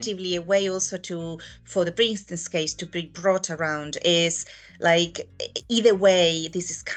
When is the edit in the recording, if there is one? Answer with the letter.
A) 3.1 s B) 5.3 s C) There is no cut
C